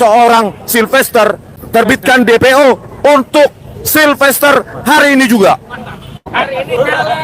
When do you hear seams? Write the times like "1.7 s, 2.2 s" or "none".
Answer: 1.6 s, 6.2 s